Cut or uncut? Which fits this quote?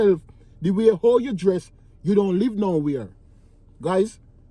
uncut